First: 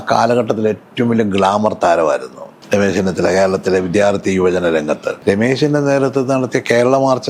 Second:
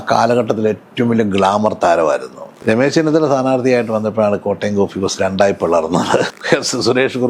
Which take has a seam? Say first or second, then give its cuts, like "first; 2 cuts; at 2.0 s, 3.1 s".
second; 2 cuts; at 2.5 s, 6.3 s